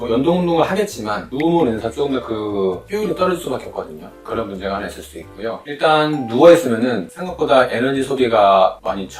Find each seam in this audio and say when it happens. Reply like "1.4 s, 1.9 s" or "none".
5.6 s